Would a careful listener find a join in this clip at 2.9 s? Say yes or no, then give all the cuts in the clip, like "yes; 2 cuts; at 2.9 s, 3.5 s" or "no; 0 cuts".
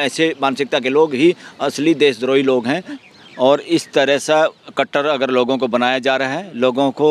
yes; 1 cut; at 2.9 s